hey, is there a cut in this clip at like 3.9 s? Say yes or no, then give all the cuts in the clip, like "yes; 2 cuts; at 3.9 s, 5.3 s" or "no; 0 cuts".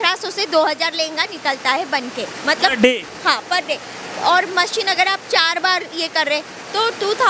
no; 0 cuts